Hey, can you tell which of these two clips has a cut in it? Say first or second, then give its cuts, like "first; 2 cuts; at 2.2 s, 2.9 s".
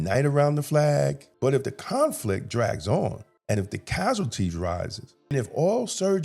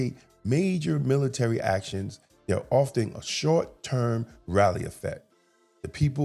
first; 3 cuts; at 1.3 s, 3.3 s, 5.3 s